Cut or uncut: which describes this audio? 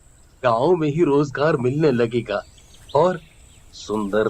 uncut